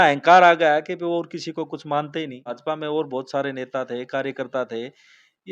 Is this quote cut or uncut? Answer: uncut